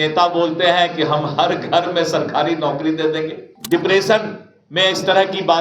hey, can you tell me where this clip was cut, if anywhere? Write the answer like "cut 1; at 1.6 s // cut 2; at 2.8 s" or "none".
cut 1; at 3.5 s